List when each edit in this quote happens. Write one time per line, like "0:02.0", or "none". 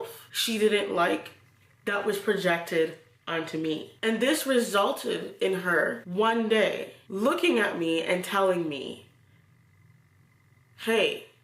none